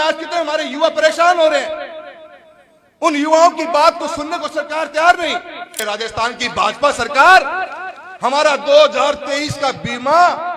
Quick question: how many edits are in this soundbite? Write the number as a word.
one